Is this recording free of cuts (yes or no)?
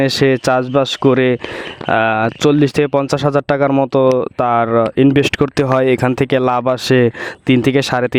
yes